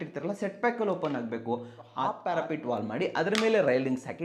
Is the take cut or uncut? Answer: cut